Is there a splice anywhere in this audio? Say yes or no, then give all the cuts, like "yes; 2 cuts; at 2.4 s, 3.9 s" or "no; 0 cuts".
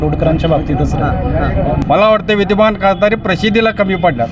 yes; 1 cut; at 1.8 s